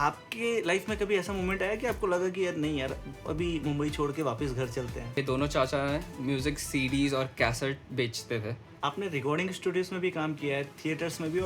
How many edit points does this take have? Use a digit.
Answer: 2